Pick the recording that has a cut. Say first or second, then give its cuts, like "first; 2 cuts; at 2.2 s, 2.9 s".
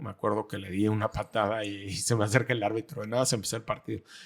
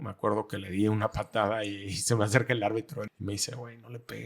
second; 1 cut; at 3.1 s